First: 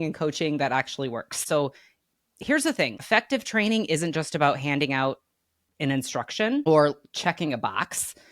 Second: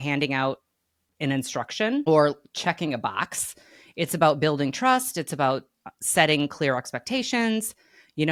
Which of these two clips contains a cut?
first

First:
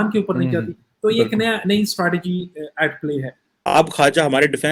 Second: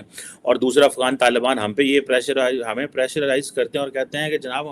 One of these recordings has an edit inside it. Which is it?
first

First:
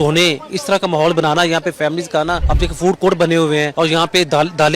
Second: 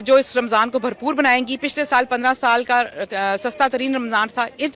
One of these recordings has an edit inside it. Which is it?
first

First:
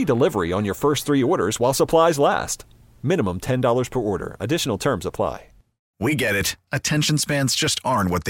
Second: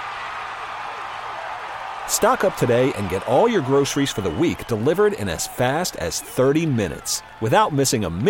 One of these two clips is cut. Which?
first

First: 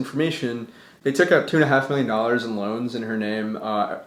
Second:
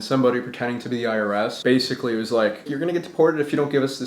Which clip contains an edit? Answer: second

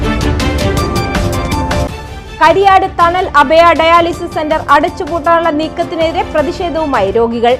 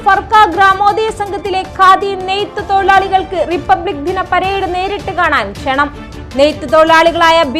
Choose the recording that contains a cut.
first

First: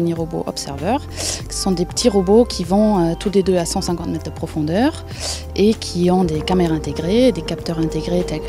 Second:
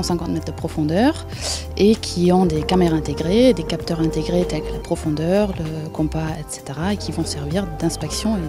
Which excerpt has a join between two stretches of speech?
first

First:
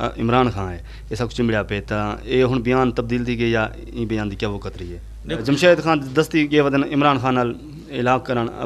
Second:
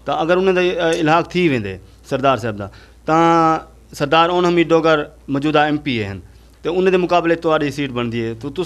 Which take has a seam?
first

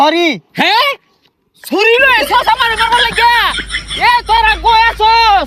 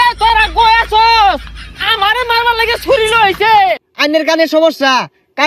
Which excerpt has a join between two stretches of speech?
second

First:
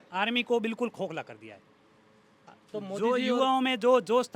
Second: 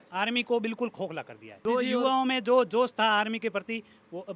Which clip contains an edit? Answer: second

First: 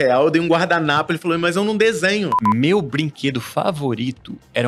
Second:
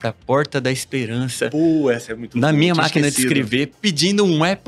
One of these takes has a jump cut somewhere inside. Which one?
first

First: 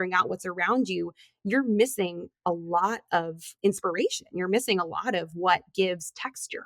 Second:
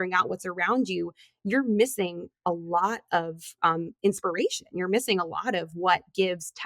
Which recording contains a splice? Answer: first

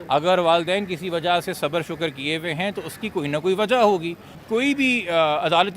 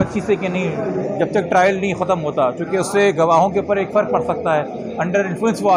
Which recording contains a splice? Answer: first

